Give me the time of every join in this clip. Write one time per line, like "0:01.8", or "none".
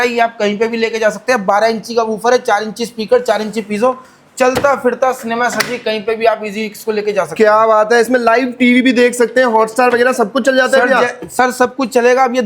none